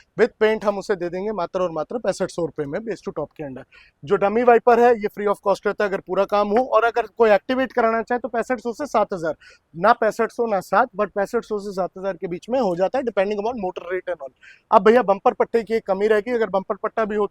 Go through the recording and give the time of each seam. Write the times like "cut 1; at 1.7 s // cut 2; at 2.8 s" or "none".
none